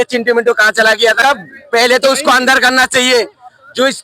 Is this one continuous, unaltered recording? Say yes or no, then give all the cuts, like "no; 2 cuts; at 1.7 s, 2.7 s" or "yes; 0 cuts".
no; 1 cut; at 1.2 s